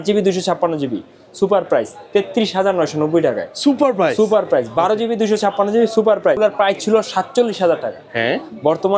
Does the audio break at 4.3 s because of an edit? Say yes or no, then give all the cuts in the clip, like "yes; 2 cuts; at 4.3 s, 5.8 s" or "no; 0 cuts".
no; 1 cut; at 6.4 s